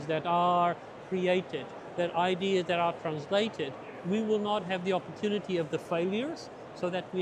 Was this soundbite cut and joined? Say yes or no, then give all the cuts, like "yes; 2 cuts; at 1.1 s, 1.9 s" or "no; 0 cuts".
no; 0 cuts